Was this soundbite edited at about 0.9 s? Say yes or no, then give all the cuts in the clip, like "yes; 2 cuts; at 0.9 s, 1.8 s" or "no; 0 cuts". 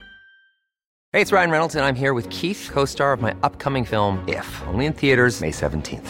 yes; 1 cut; at 0.9 s